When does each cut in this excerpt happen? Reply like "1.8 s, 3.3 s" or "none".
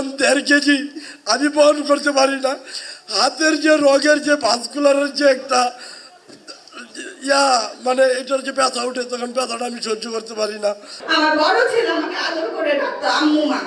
10.9 s